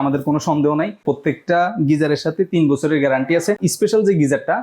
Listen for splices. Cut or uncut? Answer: cut